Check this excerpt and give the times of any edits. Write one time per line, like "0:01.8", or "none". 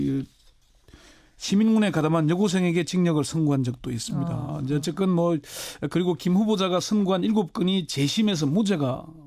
0:05.7